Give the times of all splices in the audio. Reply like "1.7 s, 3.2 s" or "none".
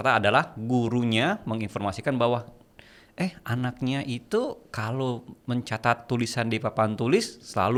none